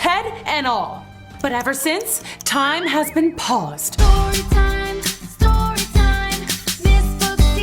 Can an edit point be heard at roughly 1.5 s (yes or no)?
no